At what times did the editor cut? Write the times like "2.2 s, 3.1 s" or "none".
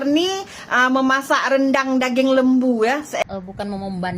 3.2 s